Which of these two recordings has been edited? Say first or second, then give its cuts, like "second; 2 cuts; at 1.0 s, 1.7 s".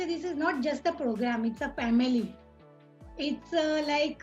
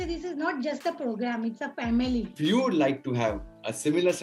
second; 1 cut; at 2.3 s